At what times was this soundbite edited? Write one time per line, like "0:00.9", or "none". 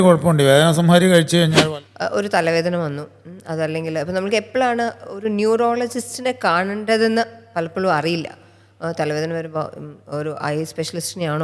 0:01.6